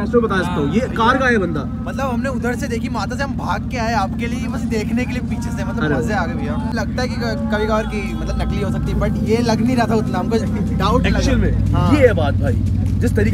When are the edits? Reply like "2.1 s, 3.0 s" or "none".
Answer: none

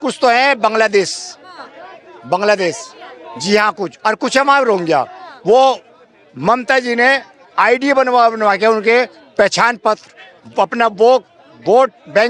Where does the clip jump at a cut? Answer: none

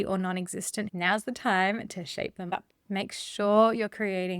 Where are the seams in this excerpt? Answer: 0.9 s

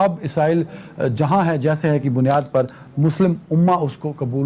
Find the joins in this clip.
none

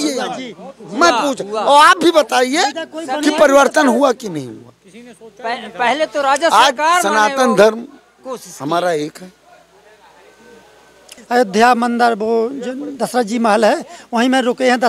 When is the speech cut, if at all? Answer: 11.0 s

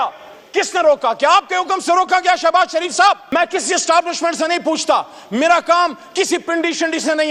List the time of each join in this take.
3.2 s

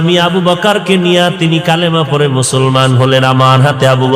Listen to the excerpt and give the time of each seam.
none

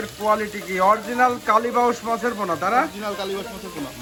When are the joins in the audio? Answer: none

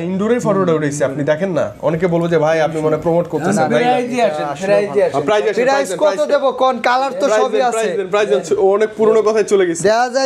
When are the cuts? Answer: none

